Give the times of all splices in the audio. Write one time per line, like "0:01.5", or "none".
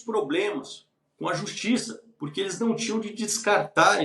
none